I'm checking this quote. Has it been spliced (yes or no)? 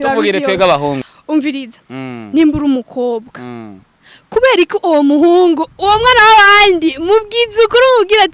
yes